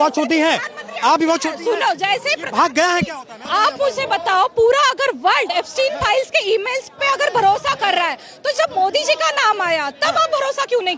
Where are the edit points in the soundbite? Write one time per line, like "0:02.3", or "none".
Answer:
0:03.4